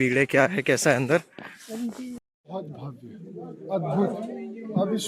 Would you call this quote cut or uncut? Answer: cut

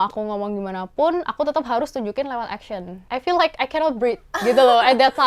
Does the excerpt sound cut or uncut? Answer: cut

